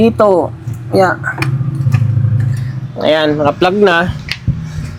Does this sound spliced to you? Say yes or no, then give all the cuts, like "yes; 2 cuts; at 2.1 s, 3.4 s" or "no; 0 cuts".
no; 0 cuts